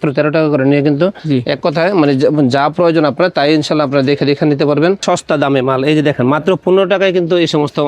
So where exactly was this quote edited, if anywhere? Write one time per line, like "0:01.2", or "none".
0:01.2
0:05.0